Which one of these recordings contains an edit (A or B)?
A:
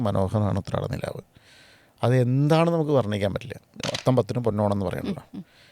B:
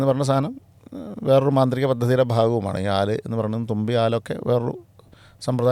A